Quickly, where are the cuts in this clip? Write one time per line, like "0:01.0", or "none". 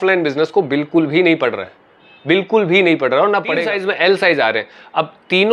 0:03.6